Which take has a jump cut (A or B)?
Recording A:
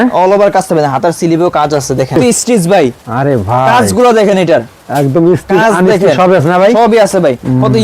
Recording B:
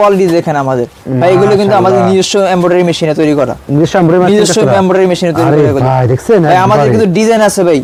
A